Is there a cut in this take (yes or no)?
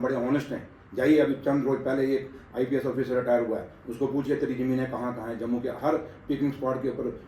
no